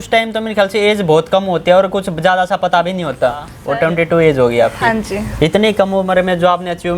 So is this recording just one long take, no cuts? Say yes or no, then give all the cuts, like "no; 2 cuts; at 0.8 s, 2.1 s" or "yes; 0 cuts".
no; 1 cut; at 3.5 s